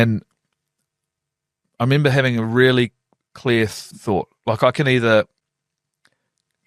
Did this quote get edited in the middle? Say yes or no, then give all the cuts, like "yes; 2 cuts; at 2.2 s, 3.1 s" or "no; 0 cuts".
yes; 1 cut; at 3.9 s